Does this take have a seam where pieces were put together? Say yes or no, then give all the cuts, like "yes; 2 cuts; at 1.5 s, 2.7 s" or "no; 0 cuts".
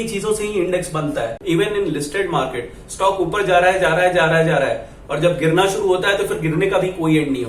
yes; 1 cut; at 1.4 s